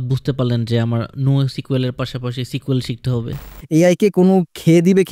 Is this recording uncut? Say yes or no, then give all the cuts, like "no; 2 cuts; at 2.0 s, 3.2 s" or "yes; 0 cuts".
no; 1 cut; at 3.5 s